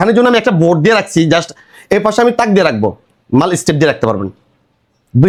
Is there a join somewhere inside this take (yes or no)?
no